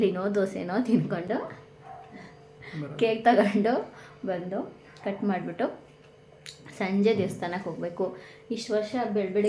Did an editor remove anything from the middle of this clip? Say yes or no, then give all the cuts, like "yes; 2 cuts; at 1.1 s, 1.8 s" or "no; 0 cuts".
no; 0 cuts